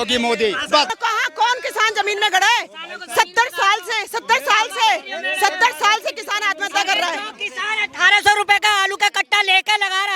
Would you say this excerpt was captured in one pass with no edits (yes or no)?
no